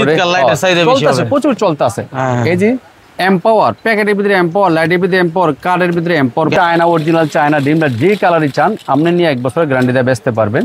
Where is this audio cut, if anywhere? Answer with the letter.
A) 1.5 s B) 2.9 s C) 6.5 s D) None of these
C